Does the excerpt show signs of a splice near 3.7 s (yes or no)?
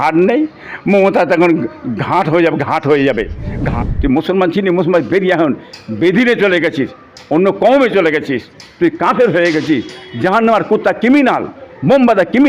yes